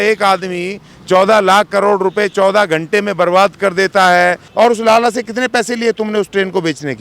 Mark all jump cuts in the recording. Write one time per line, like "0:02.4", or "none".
0:04.4